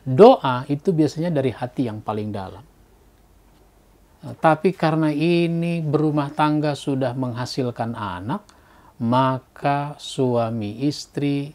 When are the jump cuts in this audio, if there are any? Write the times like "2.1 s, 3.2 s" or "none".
4.1 s